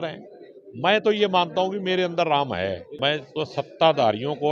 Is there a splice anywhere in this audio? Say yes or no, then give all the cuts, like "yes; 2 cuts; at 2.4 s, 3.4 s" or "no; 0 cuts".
yes; 1 cut; at 2.9 s